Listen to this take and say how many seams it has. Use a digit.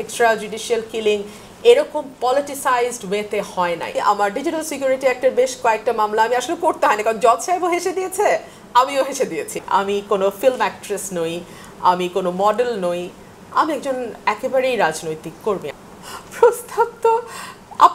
3